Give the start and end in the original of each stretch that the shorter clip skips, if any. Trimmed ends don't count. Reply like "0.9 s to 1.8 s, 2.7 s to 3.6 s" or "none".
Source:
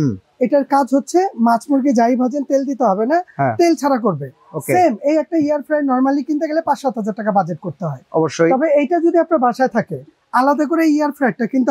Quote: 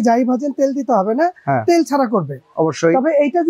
4.3 s to 8.0 s